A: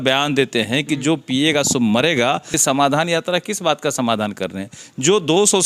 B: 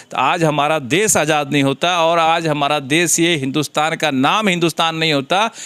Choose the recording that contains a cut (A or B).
A